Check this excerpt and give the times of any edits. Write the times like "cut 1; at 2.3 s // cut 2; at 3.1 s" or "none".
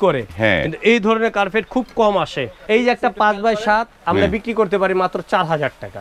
cut 1; at 2.6 s